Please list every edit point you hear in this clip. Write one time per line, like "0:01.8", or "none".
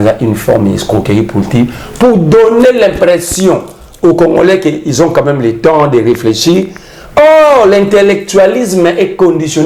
none